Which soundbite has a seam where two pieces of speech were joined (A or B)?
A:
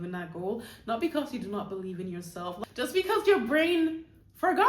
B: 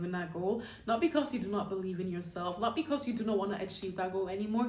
A